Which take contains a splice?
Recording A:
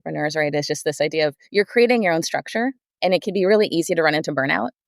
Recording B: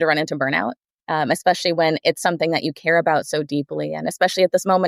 A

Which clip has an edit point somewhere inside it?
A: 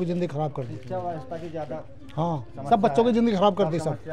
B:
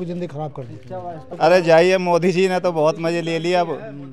B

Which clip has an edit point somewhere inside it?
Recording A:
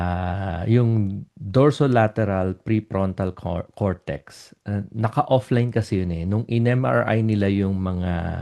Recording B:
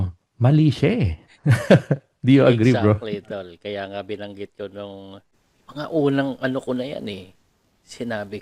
B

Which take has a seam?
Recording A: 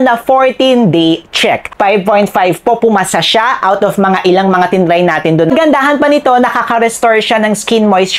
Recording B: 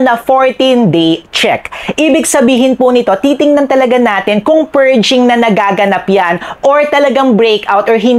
A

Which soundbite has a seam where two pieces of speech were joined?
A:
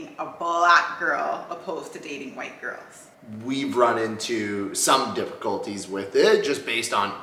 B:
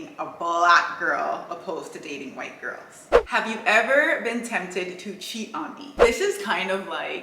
B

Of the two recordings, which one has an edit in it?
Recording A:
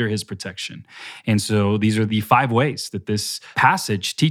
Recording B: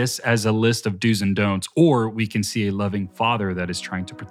A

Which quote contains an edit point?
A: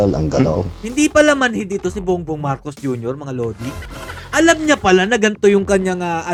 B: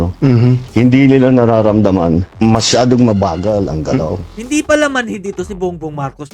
B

